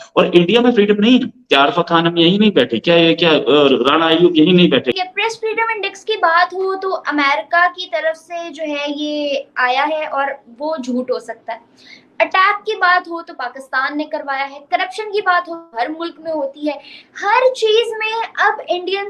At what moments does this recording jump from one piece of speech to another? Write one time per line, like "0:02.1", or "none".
0:05.0